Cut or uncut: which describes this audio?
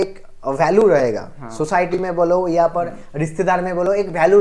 uncut